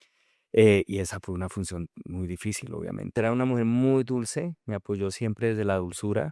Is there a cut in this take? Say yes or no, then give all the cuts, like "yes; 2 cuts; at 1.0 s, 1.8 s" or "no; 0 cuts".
yes; 1 cut; at 3.1 s